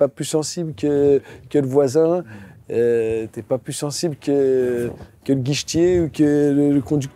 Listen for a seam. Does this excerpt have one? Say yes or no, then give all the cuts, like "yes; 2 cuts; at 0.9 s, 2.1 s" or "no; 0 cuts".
no; 0 cuts